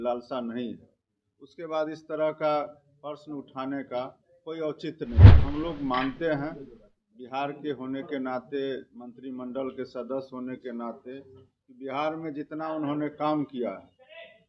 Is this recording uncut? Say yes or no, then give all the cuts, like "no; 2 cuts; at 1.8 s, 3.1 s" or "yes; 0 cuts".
no; 1 cut; at 5.4 s